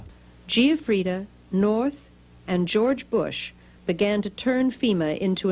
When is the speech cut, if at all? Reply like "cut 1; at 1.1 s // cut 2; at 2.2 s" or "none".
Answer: cut 1; at 2.1 s